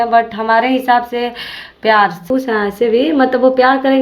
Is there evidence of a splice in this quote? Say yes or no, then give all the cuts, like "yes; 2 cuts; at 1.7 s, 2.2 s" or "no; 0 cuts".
yes; 1 cut; at 2.2 s